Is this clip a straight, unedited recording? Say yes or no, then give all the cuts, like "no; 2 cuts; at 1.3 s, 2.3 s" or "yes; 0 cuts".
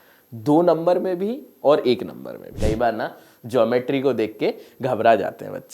no; 1 cut; at 2.5 s